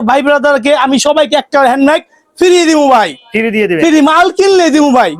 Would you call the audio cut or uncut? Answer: uncut